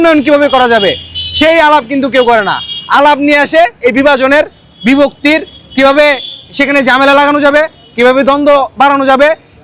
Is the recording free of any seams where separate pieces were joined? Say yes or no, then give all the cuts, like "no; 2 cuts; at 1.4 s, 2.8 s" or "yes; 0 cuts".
yes; 0 cuts